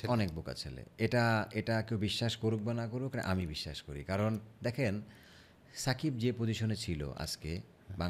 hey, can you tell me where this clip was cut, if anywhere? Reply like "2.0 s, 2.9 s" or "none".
none